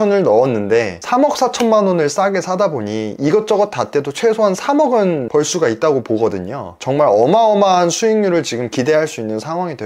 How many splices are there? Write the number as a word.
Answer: zero